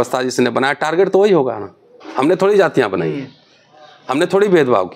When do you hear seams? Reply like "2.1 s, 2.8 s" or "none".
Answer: none